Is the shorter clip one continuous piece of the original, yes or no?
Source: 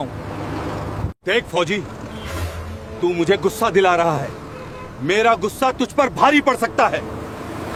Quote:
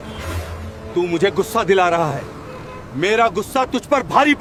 yes